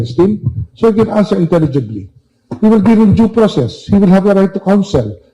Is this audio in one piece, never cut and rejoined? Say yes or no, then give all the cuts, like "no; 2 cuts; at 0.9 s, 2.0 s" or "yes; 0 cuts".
yes; 0 cuts